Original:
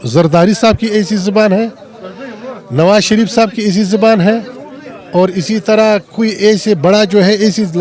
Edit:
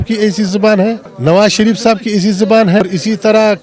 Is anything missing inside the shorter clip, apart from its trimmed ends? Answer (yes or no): yes